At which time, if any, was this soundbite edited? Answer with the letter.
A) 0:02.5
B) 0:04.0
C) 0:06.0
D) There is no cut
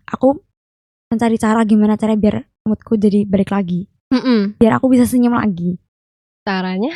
D